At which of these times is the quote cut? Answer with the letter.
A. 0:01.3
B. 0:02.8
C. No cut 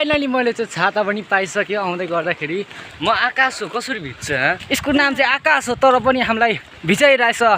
B